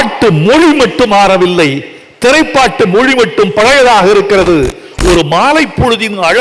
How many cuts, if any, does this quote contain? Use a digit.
1